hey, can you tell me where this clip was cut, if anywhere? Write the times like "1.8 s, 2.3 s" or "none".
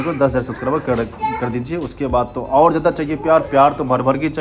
none